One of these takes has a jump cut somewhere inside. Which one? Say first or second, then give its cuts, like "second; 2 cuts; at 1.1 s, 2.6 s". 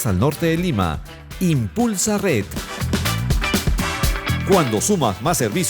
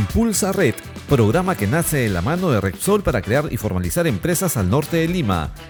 first; 2 cuts; at 2.6 s, 4.1 s